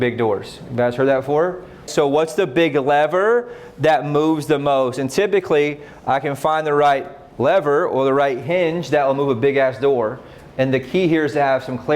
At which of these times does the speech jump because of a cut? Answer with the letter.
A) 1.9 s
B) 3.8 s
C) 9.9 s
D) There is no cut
A